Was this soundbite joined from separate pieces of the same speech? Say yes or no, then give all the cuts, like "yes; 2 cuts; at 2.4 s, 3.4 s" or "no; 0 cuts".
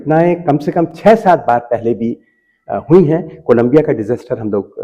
no; 0 cuts